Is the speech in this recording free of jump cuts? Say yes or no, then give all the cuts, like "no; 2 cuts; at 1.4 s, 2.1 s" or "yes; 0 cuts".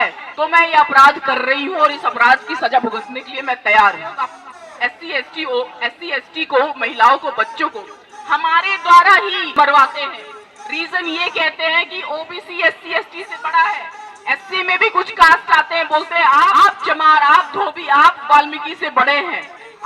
no; 3 cuts; at 4.5 s, 9.5 s, 16.5 s